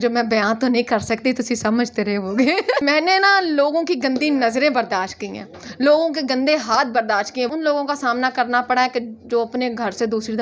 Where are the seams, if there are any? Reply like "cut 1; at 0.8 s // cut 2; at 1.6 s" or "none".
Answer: cut 1; at 2.8 s // cut 2; at 7.5 s